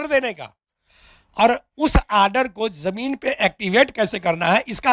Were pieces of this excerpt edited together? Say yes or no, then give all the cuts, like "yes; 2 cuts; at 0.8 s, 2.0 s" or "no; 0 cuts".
no; 0 cuts